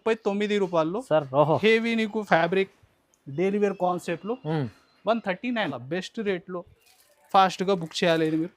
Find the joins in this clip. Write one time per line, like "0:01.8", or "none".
0:05.8